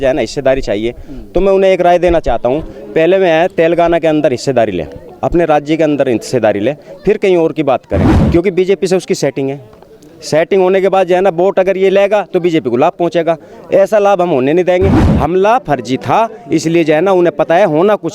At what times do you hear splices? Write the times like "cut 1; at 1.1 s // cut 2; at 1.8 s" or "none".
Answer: cut 1; at 8.1 s // cut 2; at 15.0 s

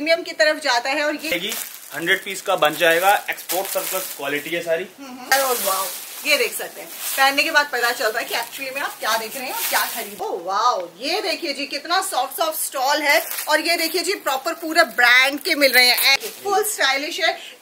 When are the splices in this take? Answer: cut 1; at 1.4 s // cut 2; at 5.3 s // cut 3; at 10.2 s // cut 4; at 16.1 s

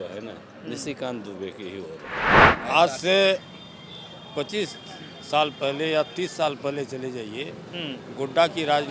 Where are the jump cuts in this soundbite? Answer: cut 1; at 2.3 s

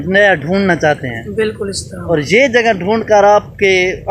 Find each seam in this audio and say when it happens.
cut 1; at 1.2 s

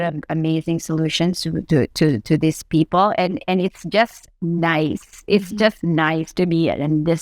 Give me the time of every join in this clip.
none

